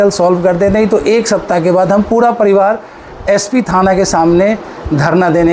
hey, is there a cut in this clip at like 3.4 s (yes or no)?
no